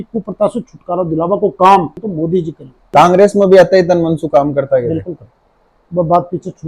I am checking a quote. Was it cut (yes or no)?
yes